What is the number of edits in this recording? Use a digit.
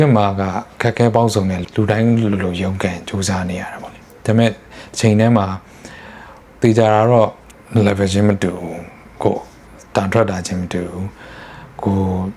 2